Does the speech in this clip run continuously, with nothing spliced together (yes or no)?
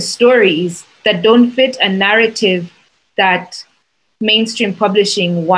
yes